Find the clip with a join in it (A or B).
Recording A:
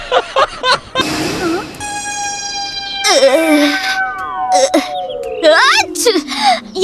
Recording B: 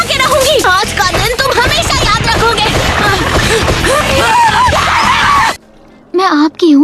A